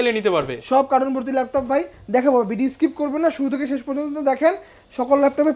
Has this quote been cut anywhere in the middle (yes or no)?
no